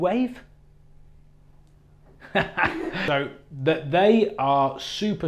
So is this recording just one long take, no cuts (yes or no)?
no